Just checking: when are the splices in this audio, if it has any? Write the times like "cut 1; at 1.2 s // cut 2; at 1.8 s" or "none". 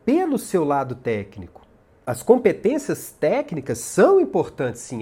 cut 1; at 1.9 s